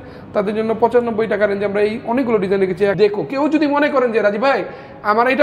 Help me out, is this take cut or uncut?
cut